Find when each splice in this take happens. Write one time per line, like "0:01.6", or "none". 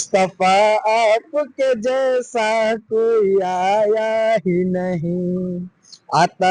none

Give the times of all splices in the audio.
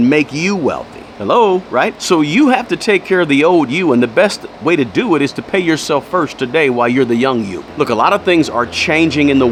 none

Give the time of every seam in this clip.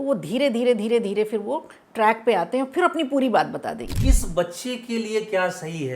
0:03.9

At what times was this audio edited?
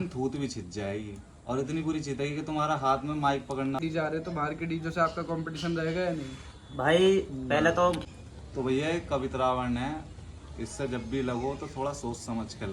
0:03.8
0:08.1

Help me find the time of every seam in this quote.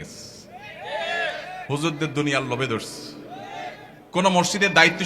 0:03.9

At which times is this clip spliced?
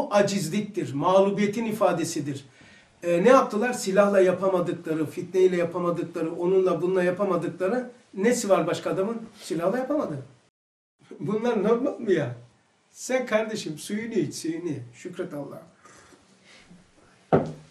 0:10.6

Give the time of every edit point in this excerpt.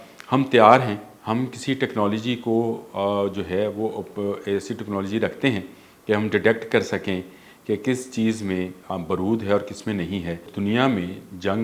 0:01.1
0:10.5

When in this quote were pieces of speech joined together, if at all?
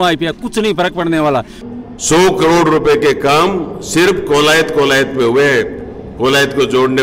0:01.6

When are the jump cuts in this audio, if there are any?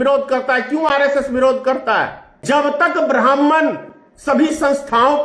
0:02.4

